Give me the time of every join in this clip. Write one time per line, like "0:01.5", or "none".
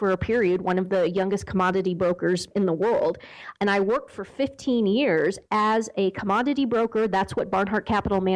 none